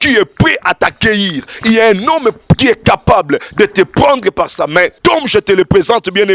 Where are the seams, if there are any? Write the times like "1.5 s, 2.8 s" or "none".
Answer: 5.0 s

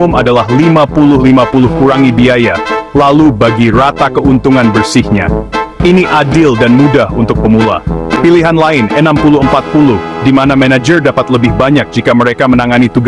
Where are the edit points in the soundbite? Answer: none

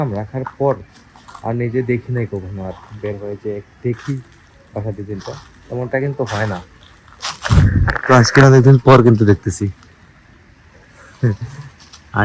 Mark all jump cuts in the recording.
none

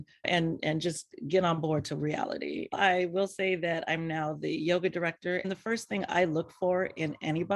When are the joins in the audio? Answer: 2.7 s, 5.4 s

